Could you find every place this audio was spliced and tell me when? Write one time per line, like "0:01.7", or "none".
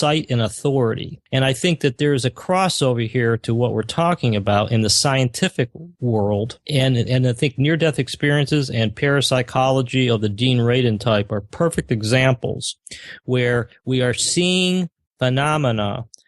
0:01.1
0:05.9
0:06.6

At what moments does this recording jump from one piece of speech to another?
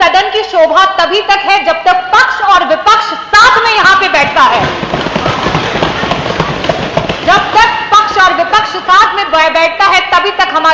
none

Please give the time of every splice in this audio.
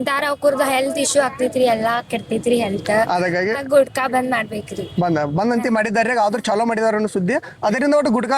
none

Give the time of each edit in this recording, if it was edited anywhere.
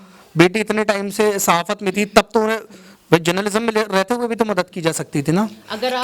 none

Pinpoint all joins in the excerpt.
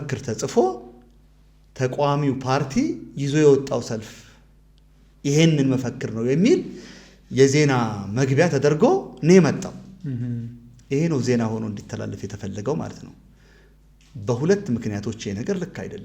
none

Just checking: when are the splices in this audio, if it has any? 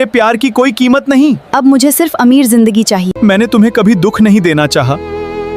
0:03.1

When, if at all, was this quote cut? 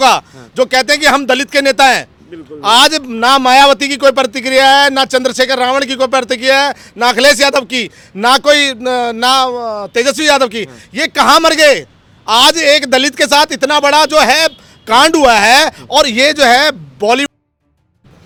none

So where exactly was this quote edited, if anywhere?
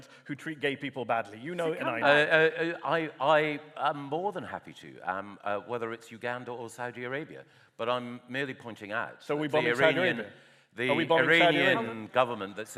none

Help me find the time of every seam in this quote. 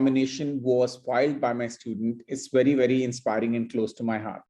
none

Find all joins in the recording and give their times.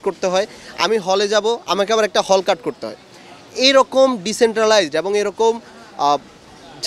none

